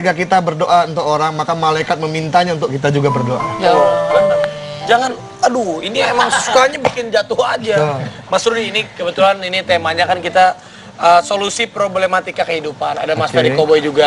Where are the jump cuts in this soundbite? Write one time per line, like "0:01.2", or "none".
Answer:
none

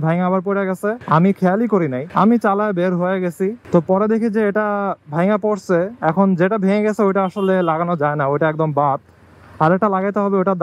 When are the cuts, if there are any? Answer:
0:01.0
0:02.0
0:03.6

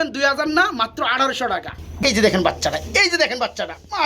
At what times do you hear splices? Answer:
0:02.0

